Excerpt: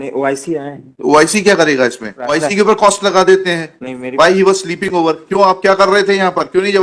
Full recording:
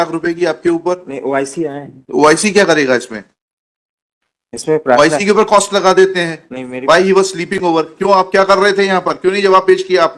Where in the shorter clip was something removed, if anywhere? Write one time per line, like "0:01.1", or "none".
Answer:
0:02.3